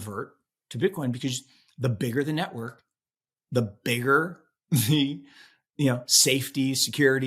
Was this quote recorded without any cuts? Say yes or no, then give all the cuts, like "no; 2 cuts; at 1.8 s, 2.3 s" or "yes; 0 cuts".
yes; 0 cuts